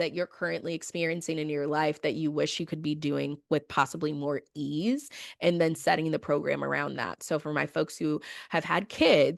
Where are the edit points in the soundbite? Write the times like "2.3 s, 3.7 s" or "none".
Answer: none